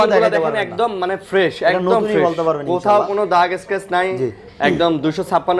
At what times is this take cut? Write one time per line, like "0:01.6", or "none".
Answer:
none